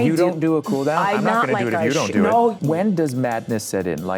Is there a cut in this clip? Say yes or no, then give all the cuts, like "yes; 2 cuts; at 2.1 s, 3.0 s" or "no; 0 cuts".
yes; 1 cut; at 2.6 s